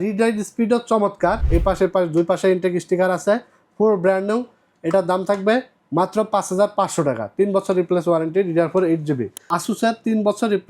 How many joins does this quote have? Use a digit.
2